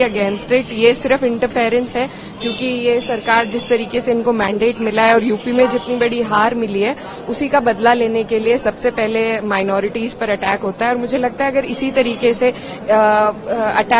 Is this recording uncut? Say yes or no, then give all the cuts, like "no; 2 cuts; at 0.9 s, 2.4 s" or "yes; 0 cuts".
yes; 0 cuts